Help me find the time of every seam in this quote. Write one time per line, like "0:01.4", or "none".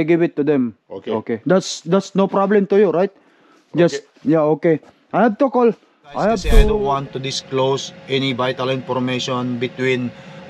0:06.8